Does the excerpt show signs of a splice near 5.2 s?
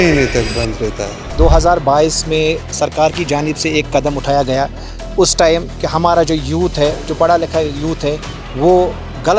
no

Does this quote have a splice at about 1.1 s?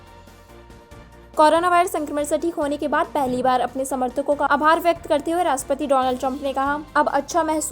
yes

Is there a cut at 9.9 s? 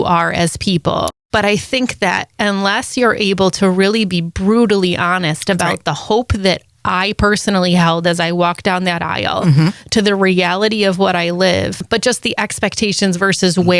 no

